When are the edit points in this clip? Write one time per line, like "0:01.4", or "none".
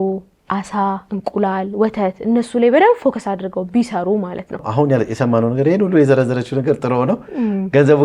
0:04.7

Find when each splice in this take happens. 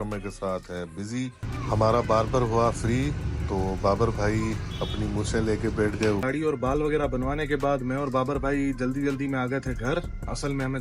0:01.4
0:06.2

